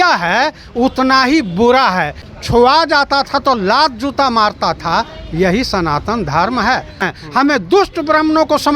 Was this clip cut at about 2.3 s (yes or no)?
yes